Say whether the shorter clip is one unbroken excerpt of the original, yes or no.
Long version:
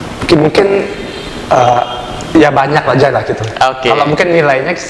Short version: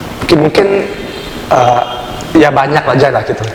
yes